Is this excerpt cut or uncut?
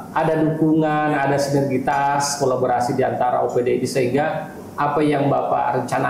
uncut